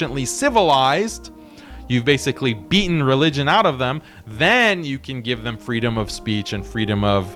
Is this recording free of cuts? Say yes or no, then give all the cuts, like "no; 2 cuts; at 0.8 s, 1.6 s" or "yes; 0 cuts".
yes; 0 cuts